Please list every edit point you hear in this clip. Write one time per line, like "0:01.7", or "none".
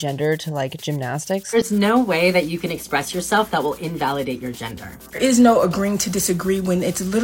0:01.5
0:05.2